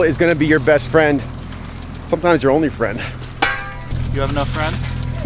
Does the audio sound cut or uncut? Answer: uncut